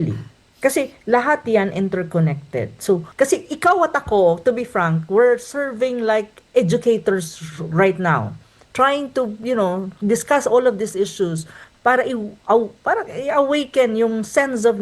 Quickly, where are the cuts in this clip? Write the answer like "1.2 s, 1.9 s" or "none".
3.1 s